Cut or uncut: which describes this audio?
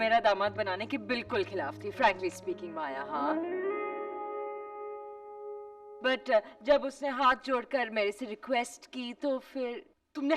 uncut